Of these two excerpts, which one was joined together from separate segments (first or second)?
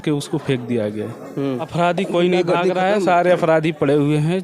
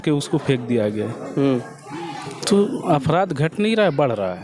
first